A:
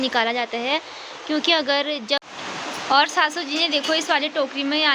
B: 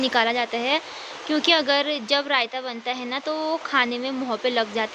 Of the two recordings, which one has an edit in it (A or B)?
A